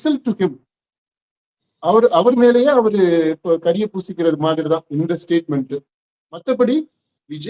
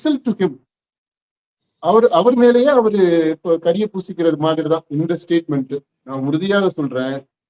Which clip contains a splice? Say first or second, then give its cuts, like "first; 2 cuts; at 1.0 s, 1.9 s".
second; 1 cut; at 6.0 s